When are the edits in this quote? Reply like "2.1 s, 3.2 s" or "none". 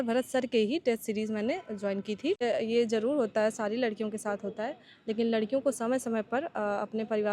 2.4 s